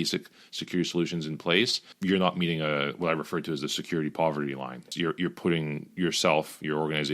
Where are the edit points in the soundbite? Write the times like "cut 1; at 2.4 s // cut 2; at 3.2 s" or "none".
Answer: cut 1; at 1.9 s // cut 2; at 4.9 s